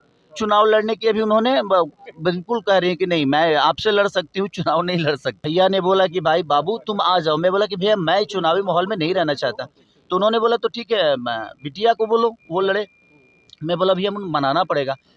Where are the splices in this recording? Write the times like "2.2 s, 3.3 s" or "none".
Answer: 5.4 s